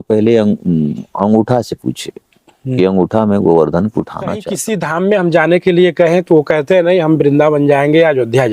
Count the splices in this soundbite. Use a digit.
1